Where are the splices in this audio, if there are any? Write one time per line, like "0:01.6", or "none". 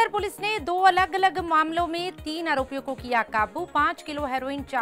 none